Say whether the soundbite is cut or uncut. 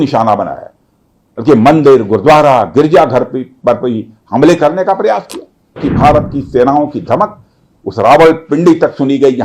cut